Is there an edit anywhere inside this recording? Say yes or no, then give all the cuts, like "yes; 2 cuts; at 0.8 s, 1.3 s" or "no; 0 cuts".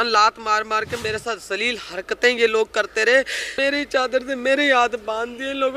yes; 2 cuts; at 1.0 s, 3.5 s